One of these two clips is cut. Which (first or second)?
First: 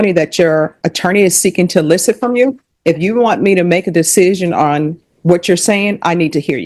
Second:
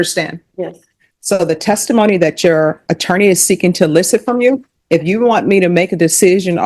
second